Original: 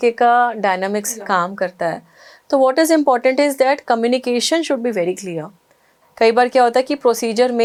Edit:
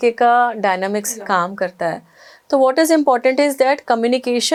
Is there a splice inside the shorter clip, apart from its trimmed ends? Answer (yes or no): no